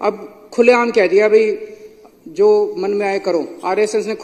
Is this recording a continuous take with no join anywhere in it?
yes; 0 cuts

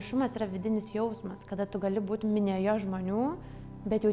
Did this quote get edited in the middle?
no; 0 cuts

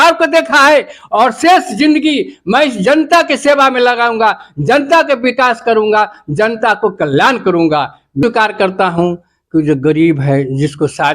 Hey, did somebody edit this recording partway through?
yes; 1 cut; at 8.2 s

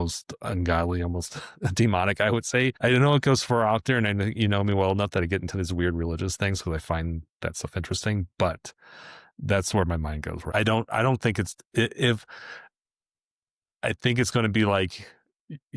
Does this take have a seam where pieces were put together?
yes; 2 cuts; at 2.8 s, 10.5 s

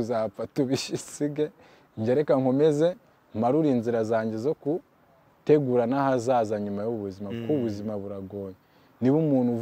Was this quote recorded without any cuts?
yes; 0 cuts

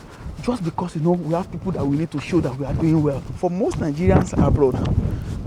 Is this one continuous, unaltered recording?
no; 1 cut; at 3.3 s

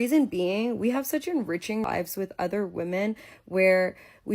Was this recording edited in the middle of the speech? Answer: yes; 1 cut; at 1.8 s

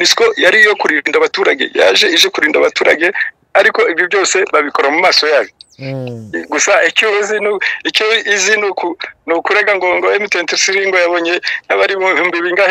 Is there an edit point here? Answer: no; 0 cuts

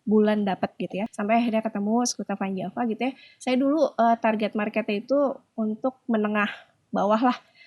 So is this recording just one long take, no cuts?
no; 1 cut; at 1.0 s

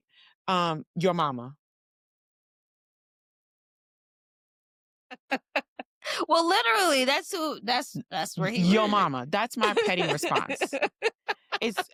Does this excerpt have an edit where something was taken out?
no; 0 cuts

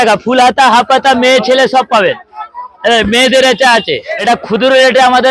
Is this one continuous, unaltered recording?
no; 1 cut; at 4.1 s

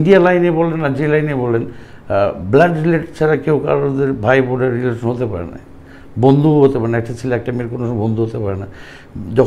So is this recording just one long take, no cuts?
yes; 0 cuts

